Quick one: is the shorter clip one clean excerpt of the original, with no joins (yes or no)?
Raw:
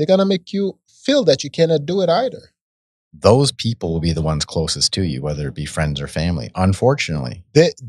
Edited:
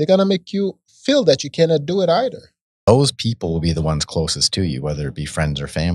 no